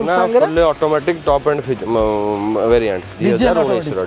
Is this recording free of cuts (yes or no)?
yes